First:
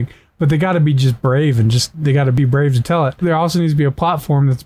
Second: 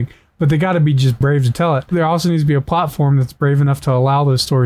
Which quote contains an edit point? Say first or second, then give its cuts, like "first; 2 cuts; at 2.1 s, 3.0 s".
second; 1 cut; at 1.2 s